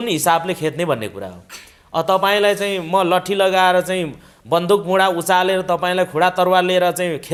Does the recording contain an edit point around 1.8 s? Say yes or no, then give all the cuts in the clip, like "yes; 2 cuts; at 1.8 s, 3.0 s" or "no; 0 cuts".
no; 0 cuts